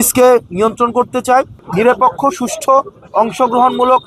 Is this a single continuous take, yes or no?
no